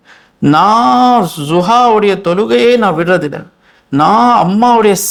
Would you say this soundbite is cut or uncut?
uncut